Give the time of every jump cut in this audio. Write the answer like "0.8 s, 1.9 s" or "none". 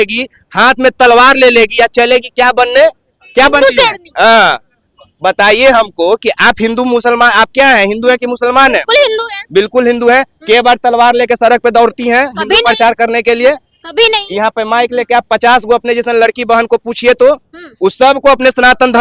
none